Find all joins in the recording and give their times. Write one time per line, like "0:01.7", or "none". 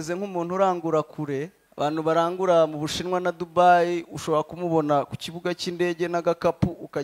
0:01.6